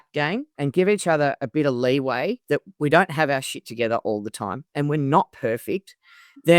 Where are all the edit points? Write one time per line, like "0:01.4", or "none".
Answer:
none